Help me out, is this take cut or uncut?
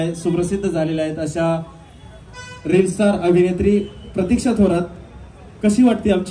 uncut